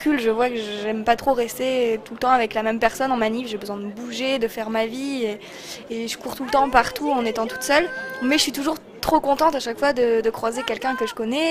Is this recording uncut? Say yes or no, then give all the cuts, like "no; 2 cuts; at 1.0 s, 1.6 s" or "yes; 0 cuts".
yes; 0 cuts